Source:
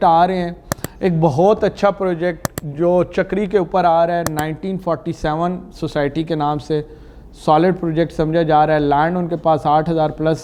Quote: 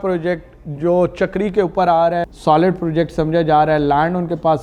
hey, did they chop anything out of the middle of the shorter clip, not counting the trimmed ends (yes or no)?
yes